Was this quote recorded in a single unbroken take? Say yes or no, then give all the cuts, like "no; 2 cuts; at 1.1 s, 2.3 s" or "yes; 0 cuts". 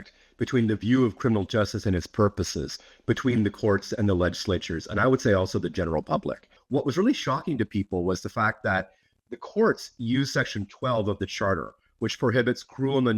no; 1 cut; at 6.6 s